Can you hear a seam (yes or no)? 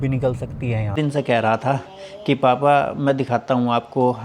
yes